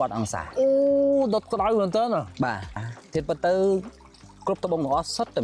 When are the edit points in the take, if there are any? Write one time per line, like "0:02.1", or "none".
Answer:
0:02.7